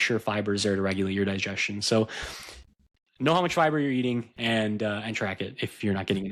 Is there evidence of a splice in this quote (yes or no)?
no